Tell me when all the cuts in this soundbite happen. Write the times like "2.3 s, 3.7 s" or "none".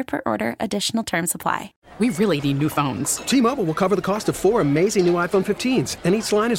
1.8 s